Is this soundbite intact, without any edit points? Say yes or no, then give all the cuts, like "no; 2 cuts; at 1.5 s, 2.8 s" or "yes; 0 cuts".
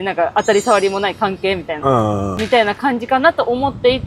no; 1 cut; at 2.4 s